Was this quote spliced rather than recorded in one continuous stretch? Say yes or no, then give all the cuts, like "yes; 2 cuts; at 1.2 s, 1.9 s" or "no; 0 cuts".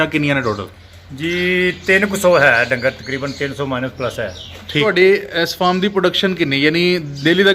yes; 1 cut; at 4.8 s